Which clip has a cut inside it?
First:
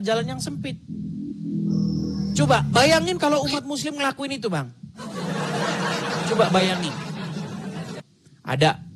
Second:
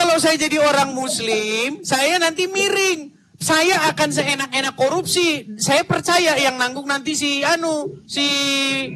first; 1 cut; at 8.0 s

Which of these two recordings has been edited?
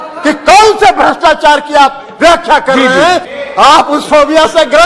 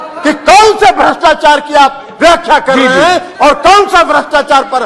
first; 1 cut; at 3.3 s

